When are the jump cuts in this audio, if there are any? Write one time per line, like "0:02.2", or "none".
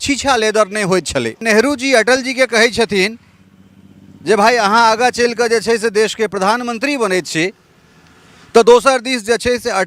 0:01.4